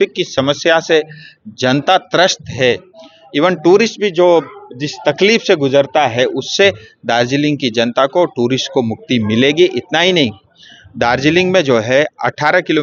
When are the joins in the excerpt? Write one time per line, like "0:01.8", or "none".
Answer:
none